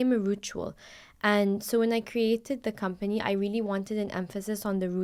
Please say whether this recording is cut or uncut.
uncut